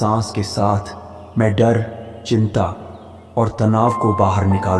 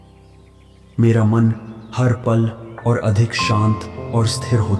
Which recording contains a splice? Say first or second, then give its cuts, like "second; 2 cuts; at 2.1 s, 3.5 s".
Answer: second; 1 cut; at 0.9 s